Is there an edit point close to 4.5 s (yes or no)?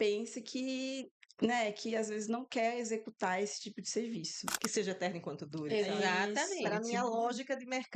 yes